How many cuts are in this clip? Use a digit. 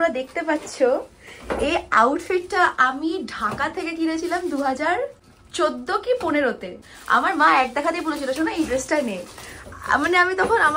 0